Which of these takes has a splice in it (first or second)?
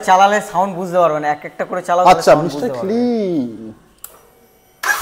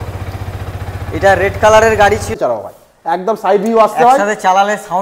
second